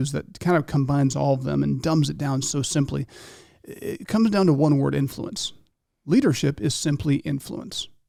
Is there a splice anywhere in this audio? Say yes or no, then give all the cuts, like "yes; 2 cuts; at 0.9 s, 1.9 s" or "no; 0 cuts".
no; 0 cuts